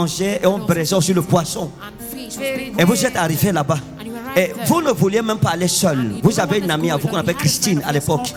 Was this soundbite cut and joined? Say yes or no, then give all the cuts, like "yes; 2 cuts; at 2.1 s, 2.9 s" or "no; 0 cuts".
no; 0 cuts